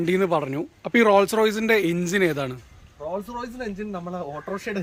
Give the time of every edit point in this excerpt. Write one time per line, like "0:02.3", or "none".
none